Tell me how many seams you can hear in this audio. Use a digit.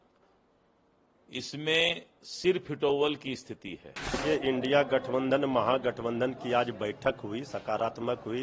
1